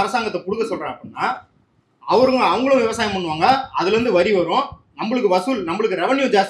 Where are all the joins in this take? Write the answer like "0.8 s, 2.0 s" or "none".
none